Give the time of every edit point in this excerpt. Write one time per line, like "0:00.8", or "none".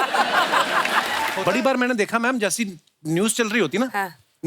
0:01.3